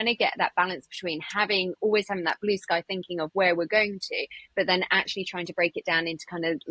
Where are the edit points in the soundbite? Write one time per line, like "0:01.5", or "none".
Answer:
none